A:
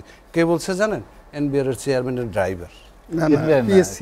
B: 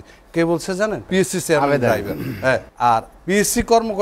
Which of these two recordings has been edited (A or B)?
B